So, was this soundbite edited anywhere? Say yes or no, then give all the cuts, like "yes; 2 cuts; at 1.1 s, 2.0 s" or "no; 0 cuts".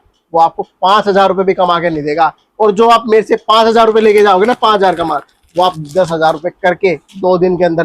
no; 0 cuts